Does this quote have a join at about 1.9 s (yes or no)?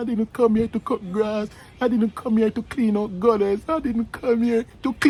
no